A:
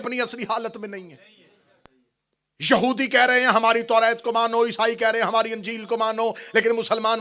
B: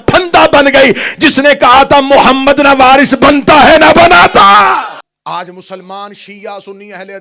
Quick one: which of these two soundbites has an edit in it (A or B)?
B